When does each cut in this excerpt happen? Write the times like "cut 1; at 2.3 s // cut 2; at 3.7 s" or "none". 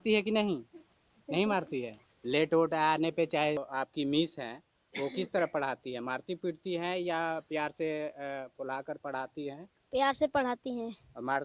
cut 1; at 3.6 s